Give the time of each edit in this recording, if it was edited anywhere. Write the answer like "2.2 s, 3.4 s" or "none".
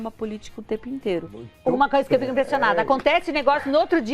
1.4 s